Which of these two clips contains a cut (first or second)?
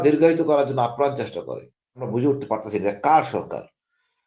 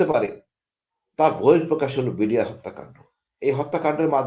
first